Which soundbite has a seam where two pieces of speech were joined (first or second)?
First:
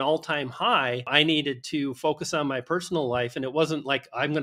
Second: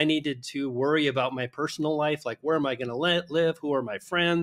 first